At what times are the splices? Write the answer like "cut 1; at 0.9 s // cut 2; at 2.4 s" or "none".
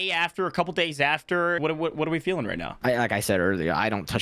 cut 1; at 1.6 s // cut 2; at 2.7 s